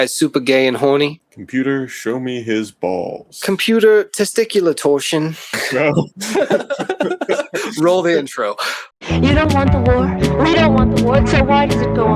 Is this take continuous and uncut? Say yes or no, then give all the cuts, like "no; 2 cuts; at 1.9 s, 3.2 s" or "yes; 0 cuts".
no; 3 cuts; at 1.3 s, 5.6 s, 8.9 s